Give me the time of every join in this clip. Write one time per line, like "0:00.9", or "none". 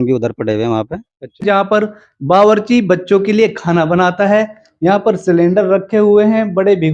0:01.4